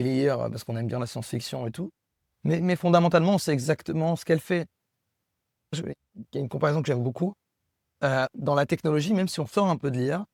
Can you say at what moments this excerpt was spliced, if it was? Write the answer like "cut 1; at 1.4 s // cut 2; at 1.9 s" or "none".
none